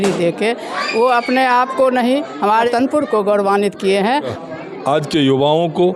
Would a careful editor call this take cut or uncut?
cut